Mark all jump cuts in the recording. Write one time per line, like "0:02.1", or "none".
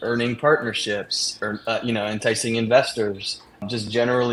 none